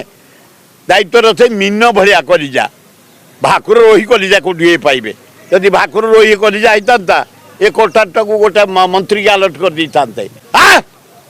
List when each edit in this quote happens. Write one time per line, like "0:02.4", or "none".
0:10.3